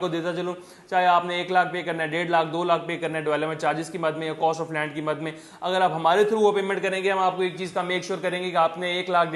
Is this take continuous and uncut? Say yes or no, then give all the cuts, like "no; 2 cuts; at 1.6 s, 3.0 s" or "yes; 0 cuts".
yes; 0 cuts